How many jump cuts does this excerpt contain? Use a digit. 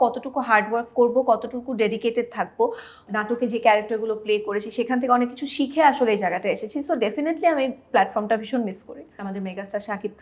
2